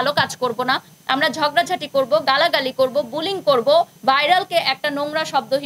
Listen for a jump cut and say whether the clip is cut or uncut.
cut